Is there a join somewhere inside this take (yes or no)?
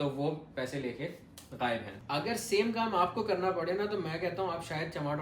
yes